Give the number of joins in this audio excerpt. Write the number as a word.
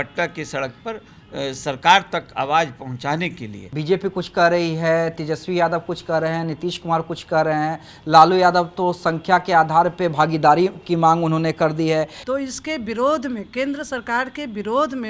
two